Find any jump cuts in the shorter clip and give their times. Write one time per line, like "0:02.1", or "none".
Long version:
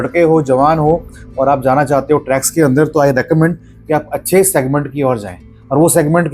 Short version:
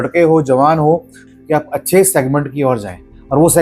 0:01.2